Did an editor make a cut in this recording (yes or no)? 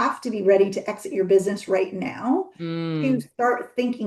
no